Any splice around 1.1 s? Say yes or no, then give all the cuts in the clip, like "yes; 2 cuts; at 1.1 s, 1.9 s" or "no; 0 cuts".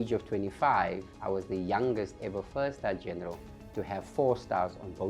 yes; 1 cut; at 1.1 s